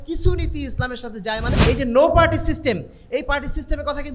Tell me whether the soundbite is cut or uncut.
cut